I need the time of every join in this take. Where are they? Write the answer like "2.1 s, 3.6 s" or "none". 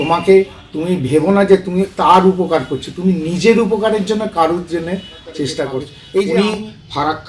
6.0 s